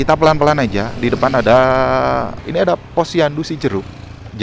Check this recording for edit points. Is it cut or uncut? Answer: cut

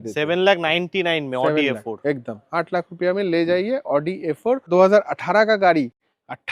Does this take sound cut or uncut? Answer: cut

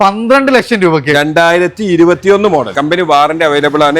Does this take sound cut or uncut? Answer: cut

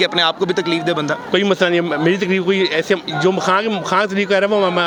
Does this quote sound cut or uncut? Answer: uncut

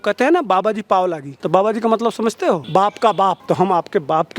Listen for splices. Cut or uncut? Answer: cut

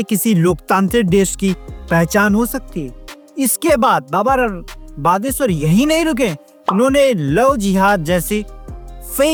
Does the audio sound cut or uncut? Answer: uncut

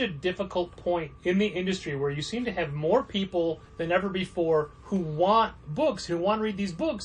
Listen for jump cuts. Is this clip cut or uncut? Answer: cut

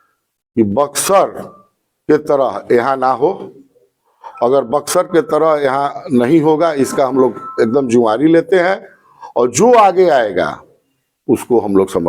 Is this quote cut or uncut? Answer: uncut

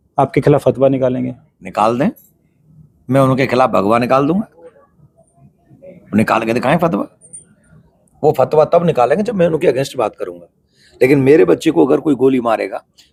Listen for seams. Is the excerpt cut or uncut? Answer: uncut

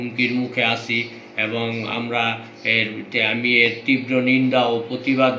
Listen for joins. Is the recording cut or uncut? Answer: uncut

